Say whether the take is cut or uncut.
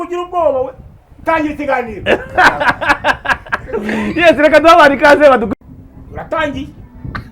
cut